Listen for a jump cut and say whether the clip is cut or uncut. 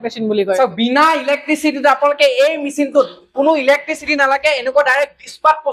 uncut